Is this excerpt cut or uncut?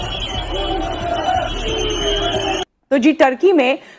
cut